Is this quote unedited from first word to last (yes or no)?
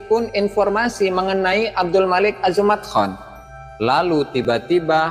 yes